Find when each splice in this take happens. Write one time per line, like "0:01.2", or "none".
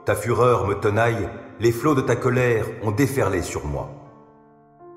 0:04.0